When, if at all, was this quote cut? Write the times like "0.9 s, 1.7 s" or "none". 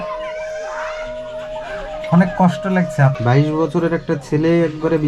3.1 s